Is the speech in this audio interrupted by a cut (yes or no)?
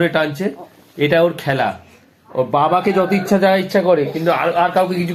no